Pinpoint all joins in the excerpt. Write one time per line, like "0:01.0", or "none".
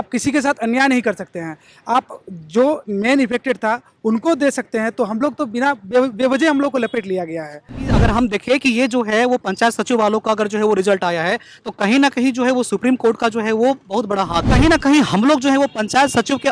0:08.0
0:14.5